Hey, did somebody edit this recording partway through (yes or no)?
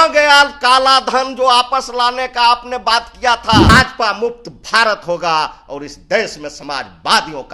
yes